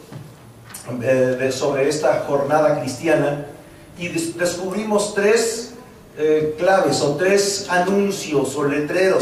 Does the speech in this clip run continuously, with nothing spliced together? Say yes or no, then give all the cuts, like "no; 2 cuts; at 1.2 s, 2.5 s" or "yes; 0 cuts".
yes; 0 cuts